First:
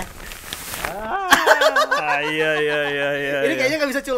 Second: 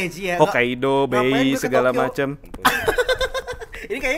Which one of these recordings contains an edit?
second; 1 cut; at 2.4 s

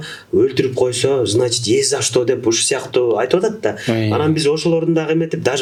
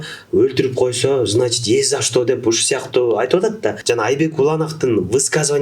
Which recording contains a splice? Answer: second; 1 cut; at 3.8 s

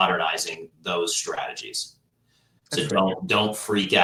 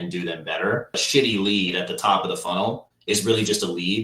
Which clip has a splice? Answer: second; 1 cut; at 1.0 s

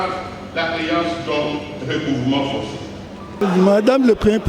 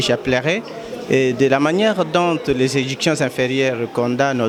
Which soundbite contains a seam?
first; 1 cut; at 3.4 s

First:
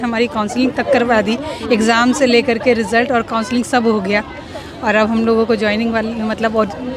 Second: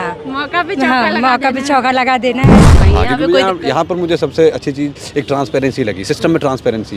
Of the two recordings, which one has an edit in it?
second; 1 cut; at 2.7 s

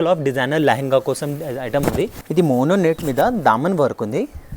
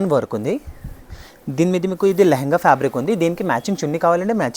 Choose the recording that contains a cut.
first; 1 cut; at 2.2 s

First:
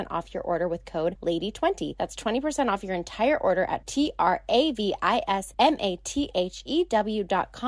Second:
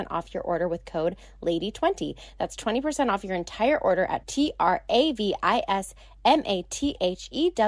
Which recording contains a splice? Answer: first; 3 cuts; at 1.2 s, 1.9 s, 5.5 s

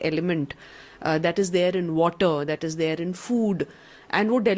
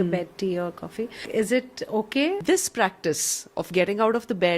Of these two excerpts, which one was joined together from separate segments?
second; 2 cuts; at 1.2 s, 2.4 s

